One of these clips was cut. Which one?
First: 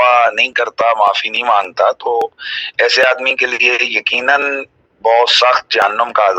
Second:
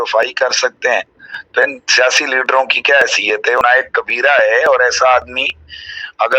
second; 1 cut; at 3.6 s

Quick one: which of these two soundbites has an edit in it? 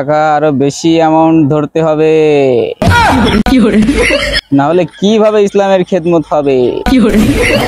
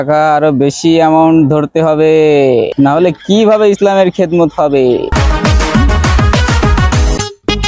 second; 2 cuts; at 2.7 s, 5.1 s

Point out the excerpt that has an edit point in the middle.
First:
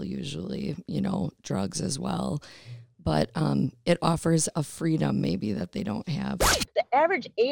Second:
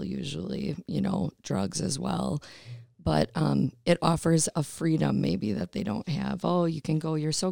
first; 1 cut; at 6.4 s

